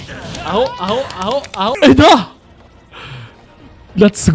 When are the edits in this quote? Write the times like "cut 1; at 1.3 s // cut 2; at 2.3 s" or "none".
cut 1; at 1.8 s